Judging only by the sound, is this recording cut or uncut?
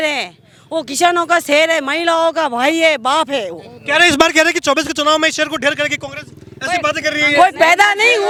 uncut